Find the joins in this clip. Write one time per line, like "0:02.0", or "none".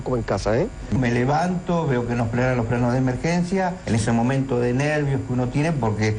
0:01.0